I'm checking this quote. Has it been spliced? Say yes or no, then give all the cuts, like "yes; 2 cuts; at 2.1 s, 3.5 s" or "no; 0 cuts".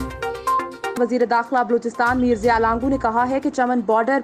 yes; 1 cut; at 1.0 s